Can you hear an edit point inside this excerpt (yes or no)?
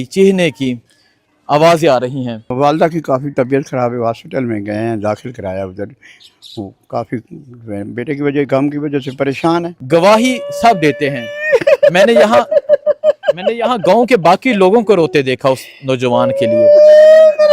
yes